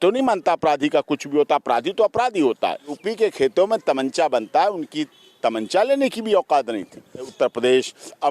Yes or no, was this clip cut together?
yes